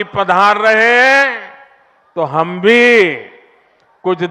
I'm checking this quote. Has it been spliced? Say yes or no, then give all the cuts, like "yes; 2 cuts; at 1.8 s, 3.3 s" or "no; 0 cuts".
no; 0 cuts